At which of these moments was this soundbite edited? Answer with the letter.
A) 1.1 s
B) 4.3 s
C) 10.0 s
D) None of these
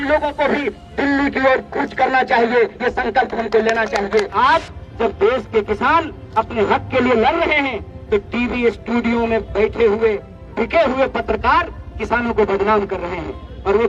B